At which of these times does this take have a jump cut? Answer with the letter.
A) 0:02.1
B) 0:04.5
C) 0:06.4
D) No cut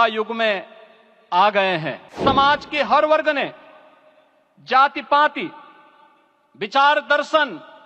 A